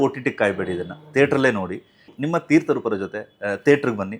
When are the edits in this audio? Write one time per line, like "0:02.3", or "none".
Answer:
0:02.2